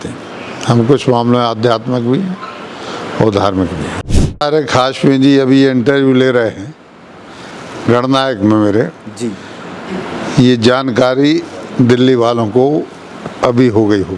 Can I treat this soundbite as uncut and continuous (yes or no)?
no